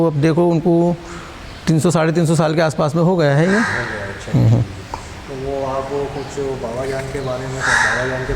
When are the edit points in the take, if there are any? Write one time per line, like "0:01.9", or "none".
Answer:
none